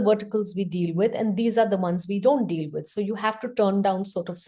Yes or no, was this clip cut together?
no